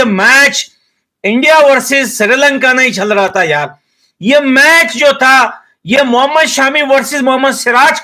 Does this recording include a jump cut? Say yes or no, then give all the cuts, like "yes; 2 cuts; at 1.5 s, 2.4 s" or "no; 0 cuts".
no; 0 cuts